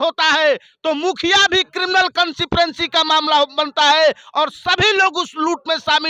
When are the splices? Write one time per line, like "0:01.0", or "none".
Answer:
none